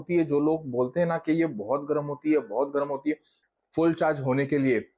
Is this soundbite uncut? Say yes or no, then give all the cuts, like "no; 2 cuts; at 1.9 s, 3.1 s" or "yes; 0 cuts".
no; 1 cut; at 3.4 s